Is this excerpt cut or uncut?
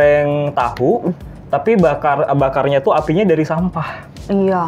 uncut